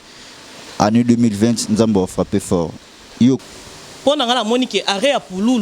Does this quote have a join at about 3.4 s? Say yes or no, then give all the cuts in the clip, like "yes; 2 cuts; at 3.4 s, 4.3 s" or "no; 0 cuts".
yes; 1 cut; at 3.4 s